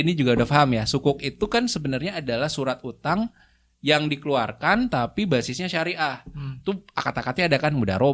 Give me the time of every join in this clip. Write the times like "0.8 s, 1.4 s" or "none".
none